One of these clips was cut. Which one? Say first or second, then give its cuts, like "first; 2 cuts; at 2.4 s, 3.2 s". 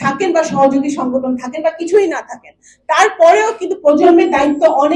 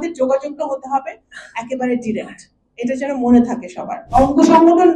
second; 1 cut; at 4.0 s